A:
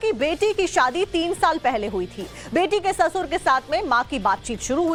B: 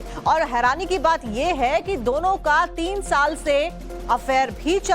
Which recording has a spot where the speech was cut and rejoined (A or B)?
B